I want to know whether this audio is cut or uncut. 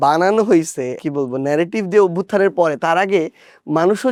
uncut